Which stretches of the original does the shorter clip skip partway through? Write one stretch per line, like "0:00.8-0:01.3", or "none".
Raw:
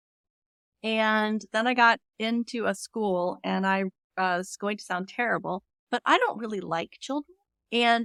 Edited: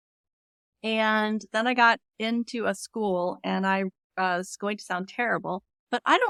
none